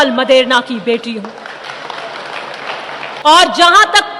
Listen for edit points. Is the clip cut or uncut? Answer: cut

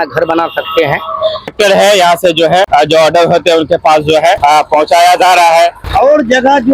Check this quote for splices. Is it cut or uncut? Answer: cut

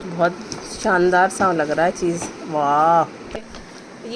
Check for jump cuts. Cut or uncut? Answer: cut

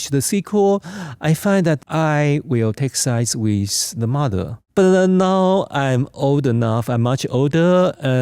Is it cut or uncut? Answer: cut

